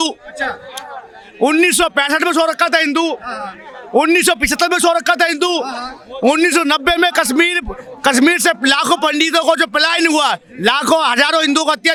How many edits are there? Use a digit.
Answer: 0